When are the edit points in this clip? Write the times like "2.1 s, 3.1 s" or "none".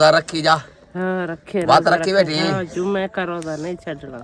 none